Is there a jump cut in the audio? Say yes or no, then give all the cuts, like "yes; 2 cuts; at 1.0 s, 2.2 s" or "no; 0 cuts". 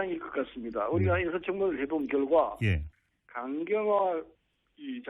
no; 0 cuts